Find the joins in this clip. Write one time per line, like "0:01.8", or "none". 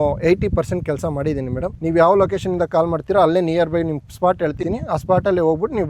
0:01.8
0:04.6